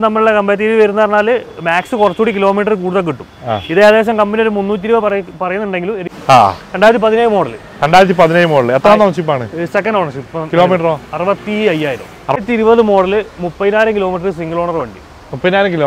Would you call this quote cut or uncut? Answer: cut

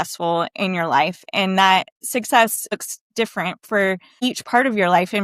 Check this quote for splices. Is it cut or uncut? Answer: cut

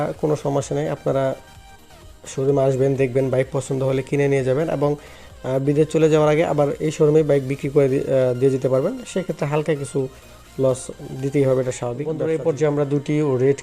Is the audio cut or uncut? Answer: cut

